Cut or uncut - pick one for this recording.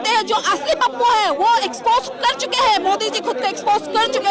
uncut